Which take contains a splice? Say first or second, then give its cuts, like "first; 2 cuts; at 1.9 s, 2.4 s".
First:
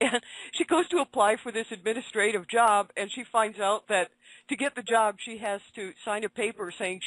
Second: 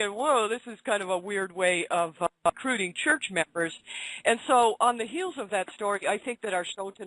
first; 1 cut; at 6.0 s